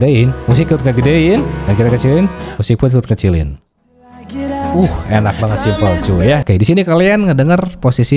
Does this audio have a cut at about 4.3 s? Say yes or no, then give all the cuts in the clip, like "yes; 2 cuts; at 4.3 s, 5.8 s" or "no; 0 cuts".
no; 1 cut; at 6.4 s